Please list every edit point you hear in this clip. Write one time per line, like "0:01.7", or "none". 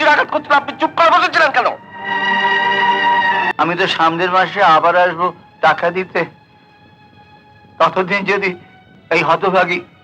0:03.5

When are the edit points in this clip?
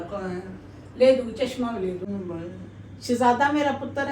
0:02.1

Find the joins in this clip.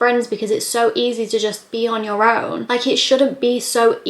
0:02.6

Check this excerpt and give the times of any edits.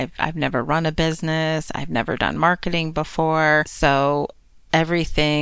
0:03.7

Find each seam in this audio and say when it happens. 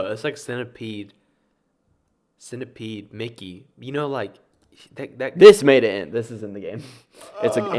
none

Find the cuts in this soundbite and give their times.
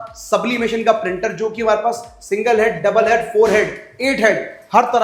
none

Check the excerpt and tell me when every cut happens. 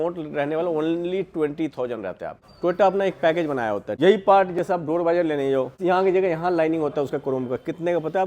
0:02.4
0:03.9
0:05.7

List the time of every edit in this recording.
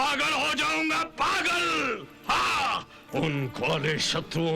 0:03.0

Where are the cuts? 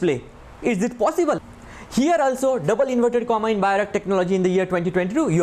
0:01.5

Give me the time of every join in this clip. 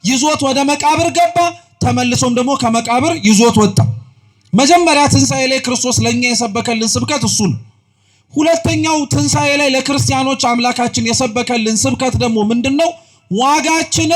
none

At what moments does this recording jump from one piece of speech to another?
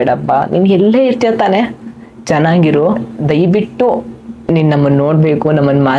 0:03.1

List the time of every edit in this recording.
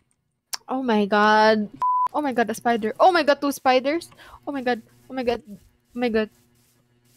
0:01.8

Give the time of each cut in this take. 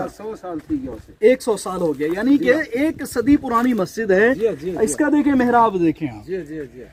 none

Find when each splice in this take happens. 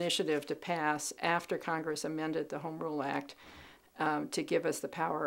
none

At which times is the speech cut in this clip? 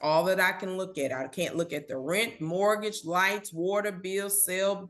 0:01.3

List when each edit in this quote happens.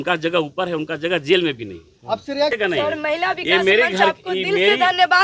0:02.5

